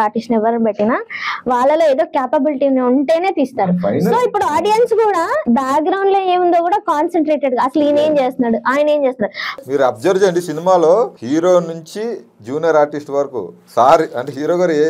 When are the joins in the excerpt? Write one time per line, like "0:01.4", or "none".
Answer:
0:05.4
0:09.7
0:11.2

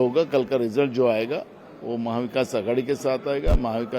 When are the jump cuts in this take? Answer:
none

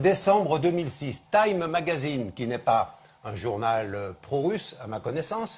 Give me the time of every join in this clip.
0:03.9

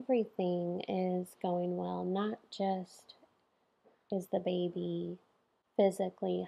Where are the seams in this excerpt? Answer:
none

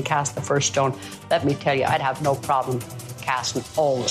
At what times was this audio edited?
none

